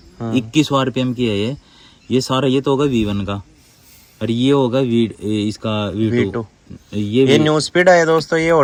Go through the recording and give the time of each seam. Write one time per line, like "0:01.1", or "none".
none